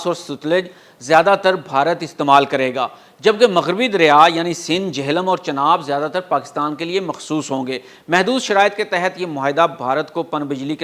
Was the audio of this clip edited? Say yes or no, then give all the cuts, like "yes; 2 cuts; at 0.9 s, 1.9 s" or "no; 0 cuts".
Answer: no; 0 cuts